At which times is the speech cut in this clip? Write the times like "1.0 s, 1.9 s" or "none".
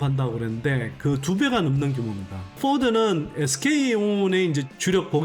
2.4 s